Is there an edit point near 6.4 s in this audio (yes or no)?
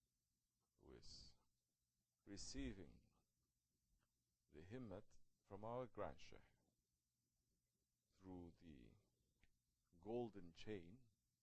yes